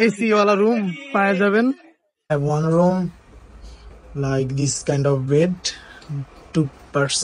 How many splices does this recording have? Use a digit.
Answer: 1